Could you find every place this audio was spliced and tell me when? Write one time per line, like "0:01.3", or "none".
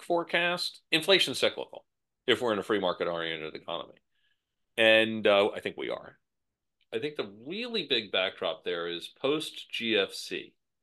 0:06.6